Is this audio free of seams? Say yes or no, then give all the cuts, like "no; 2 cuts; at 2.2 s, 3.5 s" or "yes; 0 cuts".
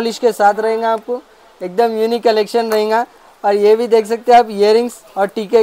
yes; 0 cuts